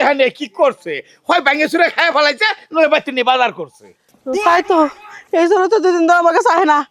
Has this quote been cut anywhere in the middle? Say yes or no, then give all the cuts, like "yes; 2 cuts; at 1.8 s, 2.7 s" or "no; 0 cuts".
no; 0 cuts